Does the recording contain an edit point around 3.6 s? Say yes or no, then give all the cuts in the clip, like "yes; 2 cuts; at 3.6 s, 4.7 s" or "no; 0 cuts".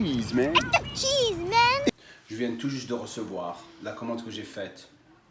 no; 1 cut; at 1.9 s